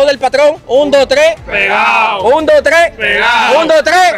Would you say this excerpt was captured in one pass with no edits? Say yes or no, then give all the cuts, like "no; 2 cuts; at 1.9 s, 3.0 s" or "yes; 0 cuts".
yes; 0 cuts